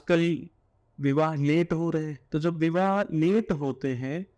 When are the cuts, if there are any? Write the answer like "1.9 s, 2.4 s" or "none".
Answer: 2.2 s